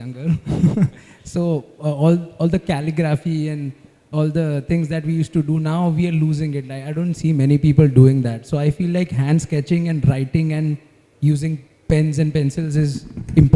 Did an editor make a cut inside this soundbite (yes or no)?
no